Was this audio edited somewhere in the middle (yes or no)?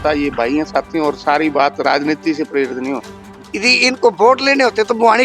yes